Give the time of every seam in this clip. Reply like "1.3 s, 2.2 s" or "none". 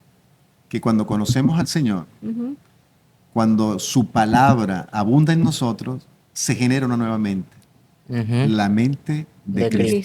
none